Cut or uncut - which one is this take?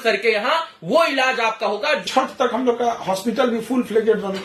cut